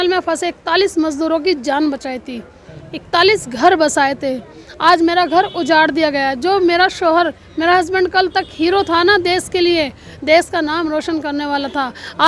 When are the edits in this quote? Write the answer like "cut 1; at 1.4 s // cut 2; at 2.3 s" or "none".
none